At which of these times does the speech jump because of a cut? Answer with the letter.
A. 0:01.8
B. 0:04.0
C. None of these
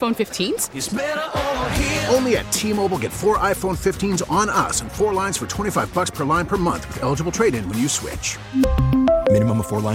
C